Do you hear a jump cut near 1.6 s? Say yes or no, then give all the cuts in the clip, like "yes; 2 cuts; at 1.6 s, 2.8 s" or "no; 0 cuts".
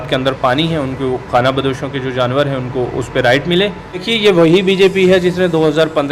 no; 1 cut; at 4.1 s